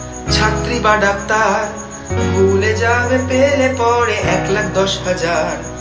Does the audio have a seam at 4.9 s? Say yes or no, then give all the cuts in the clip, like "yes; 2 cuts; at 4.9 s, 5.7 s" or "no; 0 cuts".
no; 0 cuts